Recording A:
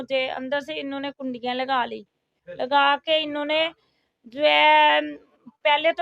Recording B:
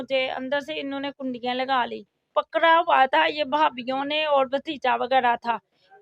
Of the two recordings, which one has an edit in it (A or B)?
B